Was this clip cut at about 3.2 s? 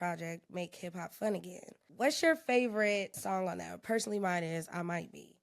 yes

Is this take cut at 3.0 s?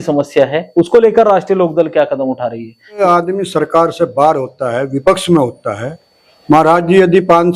yes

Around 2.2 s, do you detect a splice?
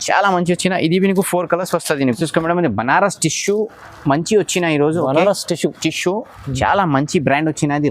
yes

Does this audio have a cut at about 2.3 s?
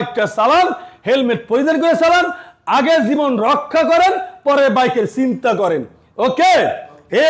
no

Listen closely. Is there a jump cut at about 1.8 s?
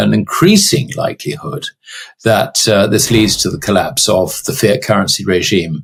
no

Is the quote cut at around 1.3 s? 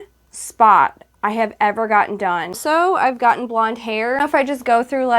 no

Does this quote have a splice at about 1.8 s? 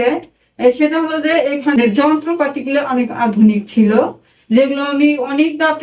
yes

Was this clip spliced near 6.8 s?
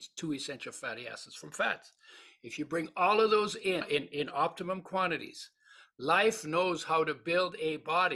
no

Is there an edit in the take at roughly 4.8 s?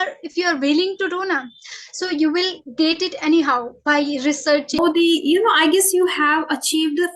yes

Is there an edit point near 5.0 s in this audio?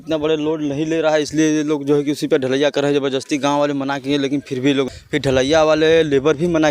yes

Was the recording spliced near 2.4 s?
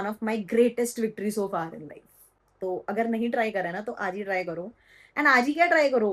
no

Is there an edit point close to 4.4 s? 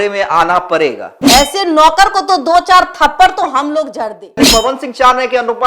yes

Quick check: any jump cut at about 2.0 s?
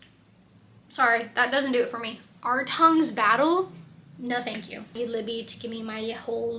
no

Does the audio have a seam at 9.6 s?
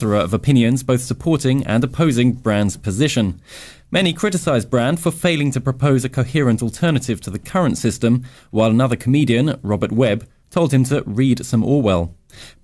yes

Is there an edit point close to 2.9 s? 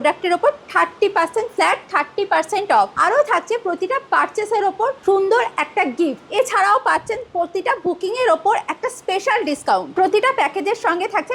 yes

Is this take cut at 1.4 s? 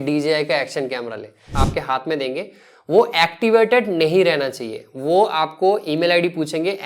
yes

